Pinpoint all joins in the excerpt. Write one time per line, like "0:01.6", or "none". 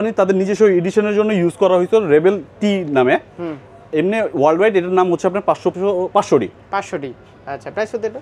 none